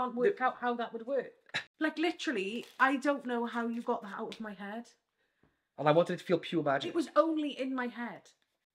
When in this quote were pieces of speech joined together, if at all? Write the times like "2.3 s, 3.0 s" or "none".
none